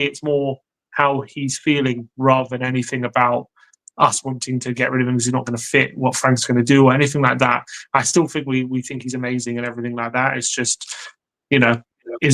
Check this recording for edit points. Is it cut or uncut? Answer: uncut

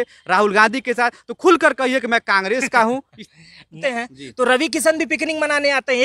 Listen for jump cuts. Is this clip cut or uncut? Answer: cut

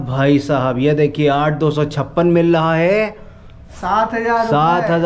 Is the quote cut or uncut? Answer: uncut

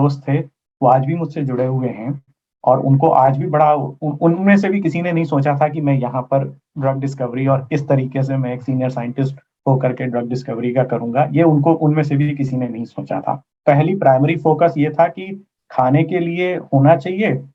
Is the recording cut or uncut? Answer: uncut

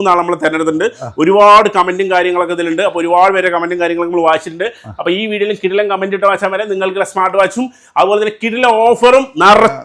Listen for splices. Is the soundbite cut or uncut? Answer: uncut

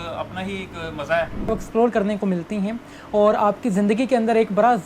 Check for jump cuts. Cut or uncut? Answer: cut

